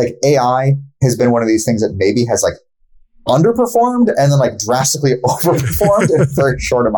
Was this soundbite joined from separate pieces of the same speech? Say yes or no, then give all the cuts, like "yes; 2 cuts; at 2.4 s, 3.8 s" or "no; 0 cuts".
no; 0 cuts